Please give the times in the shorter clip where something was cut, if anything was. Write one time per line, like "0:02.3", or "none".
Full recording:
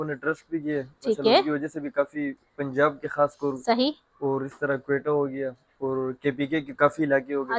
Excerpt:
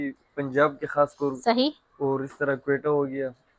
none